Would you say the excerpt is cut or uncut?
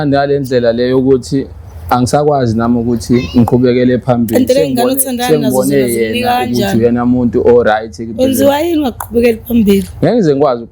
uncut